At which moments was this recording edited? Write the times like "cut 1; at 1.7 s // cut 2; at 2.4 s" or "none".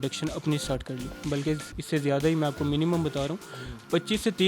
cut 1; at 1.1 s